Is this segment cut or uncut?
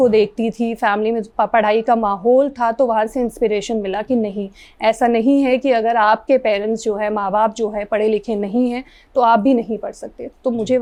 uncut